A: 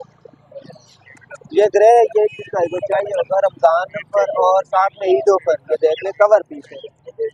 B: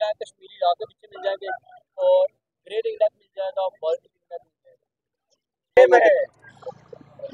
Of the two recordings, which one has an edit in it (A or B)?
B